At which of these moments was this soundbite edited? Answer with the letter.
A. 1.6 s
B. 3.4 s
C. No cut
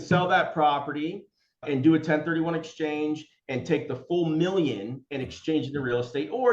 A